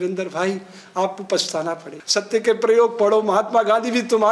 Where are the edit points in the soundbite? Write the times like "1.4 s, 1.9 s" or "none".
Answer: 1.9 s